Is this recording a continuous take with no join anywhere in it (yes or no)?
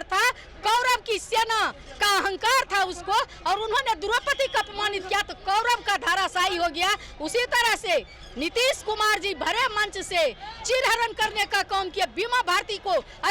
yes